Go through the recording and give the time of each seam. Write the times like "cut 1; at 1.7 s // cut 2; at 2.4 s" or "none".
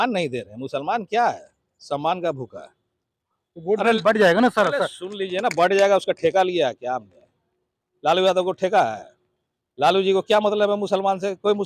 none